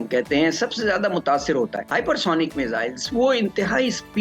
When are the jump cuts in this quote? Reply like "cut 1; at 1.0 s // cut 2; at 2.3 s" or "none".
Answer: cut 1; at 1.8 s

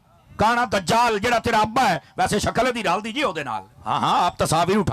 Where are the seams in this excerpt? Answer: cut 1; at 3.7 s

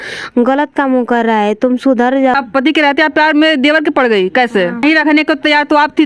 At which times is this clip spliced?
cut 1; at 2.3 s // cut 2; at 4.8 s

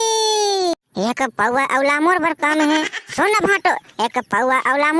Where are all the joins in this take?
none

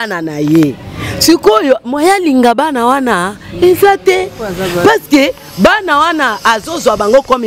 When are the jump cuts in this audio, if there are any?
none

